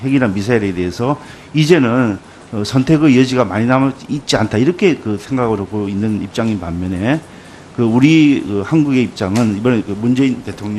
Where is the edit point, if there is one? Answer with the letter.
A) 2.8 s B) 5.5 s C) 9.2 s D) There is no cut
B